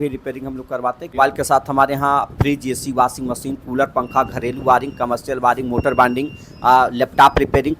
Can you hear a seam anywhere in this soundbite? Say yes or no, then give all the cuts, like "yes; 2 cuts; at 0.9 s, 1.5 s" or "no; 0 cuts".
yes; 1 cut; at 1.1 s